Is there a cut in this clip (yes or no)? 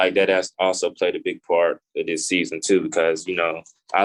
no